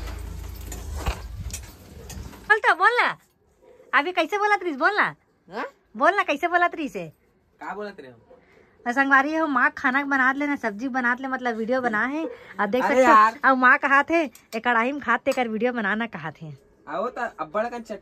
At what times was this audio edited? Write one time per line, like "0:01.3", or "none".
0:02.4